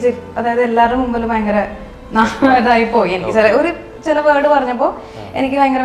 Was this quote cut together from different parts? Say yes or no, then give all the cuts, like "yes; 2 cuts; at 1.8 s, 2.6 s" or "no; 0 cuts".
no; 0 cuts